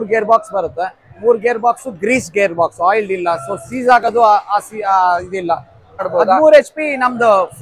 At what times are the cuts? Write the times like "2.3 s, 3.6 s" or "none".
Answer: 6.1 s